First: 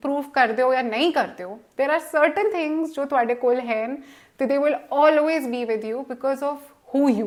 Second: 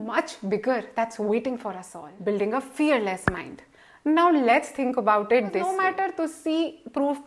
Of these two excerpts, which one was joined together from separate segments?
second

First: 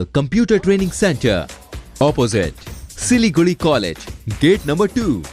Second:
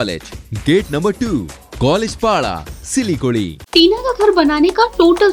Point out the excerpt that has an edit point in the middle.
second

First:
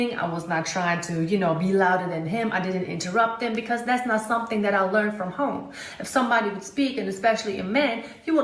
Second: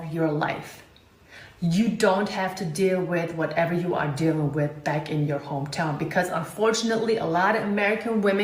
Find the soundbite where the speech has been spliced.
first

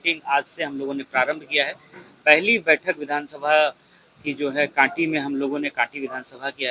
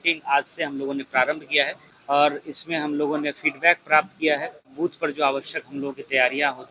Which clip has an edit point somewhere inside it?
second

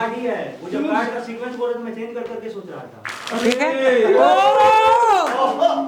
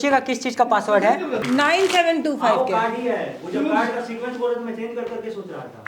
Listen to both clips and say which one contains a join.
second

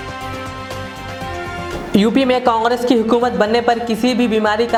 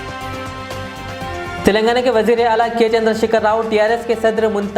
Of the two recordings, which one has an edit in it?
second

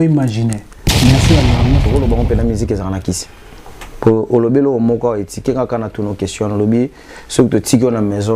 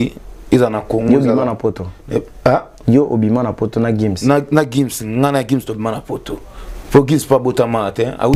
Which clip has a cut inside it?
first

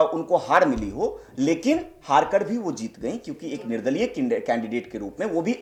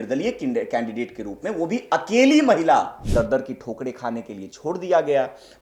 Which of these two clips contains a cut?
second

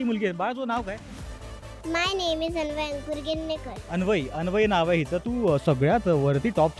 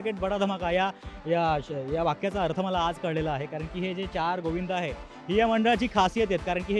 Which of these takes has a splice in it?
first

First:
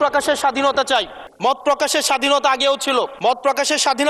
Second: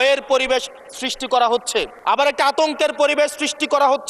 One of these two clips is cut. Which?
second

